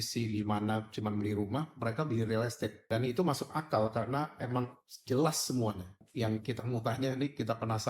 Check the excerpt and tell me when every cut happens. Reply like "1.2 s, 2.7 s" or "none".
2.8 s, 6.0 s